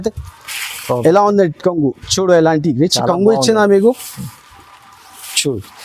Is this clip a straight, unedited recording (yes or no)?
yes